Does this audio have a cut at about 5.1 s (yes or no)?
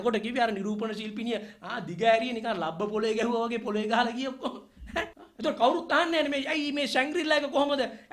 yes